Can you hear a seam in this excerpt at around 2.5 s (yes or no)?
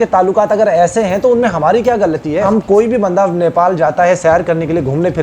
yes